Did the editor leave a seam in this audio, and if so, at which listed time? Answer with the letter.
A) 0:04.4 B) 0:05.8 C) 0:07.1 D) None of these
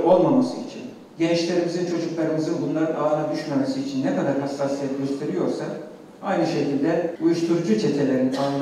C